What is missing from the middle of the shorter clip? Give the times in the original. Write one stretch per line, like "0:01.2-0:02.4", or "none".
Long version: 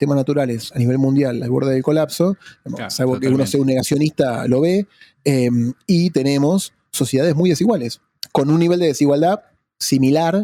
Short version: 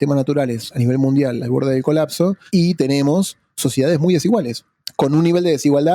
0:02.4-0:05.8